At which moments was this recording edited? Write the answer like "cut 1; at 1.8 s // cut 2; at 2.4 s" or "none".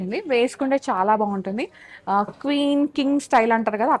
none